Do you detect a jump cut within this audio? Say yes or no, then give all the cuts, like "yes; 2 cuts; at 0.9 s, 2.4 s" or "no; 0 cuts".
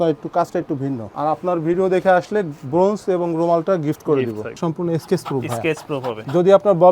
yes; 2 cuts; at 1.0 s, 4.5 s